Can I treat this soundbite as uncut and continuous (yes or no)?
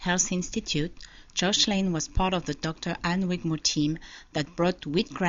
yes